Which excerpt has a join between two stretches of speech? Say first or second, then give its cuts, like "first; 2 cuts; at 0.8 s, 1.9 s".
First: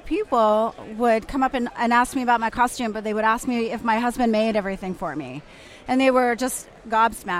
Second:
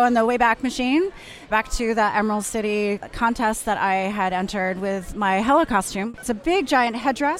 second; 3 cuts; at 1.5 s, 3.0 s, 6.2 s